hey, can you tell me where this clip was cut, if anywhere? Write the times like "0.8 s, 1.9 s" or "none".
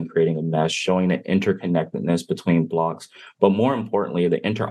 none